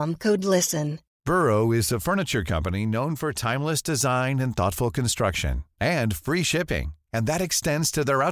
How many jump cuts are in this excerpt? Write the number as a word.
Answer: one